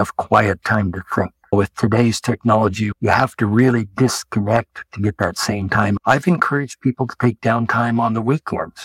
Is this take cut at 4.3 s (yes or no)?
no